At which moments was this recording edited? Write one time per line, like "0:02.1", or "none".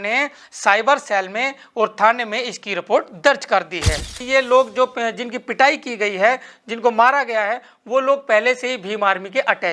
0:04.1